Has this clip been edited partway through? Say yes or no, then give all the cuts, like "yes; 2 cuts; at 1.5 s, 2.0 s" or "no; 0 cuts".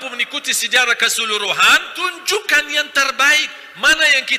yes; 1 cut; at 1.9 s